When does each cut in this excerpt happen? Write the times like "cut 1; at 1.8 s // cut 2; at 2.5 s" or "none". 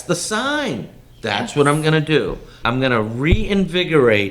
cut 1; at 2.5 s